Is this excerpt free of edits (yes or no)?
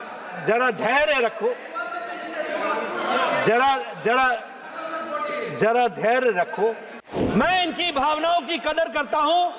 no